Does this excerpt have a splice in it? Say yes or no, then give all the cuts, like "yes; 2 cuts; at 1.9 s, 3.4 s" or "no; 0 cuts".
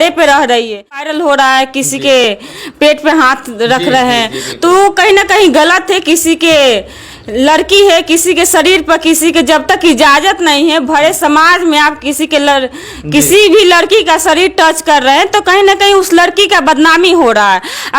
yes; 1 cut; at 1.1 s